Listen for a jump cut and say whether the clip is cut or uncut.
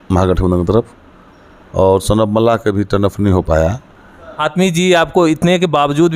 cut